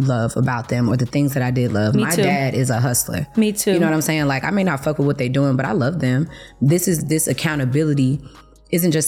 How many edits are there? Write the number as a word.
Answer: zero